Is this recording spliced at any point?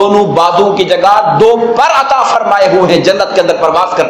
no; 0 cuts

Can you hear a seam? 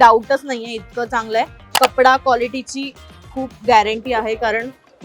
yes; 1 cut; at 1.6 s

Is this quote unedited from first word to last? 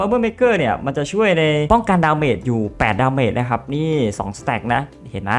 no; 1 cut; at 1.6 s

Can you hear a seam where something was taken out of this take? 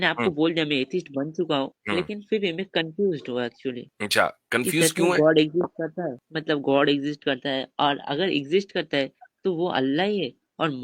yes; 3 cuts; at 1.8 s, 3.9 s, 6.3 s

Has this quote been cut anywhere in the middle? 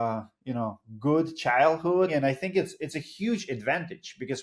yes; 1 cut; at 2.1 s

